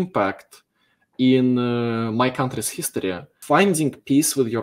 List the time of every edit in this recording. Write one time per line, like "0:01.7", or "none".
0:03.3